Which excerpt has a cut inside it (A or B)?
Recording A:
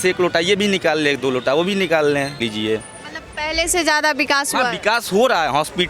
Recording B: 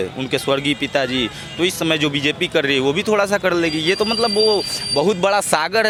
A